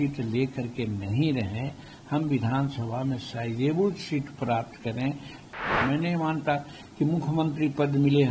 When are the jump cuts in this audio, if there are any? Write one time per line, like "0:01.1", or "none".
0:05.6